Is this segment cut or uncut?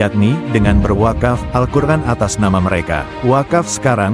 uncut